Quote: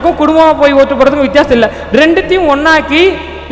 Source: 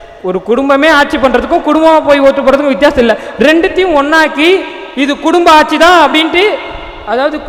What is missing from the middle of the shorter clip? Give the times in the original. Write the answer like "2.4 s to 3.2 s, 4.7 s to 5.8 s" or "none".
none